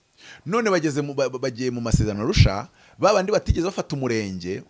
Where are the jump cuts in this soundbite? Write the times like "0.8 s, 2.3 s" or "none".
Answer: none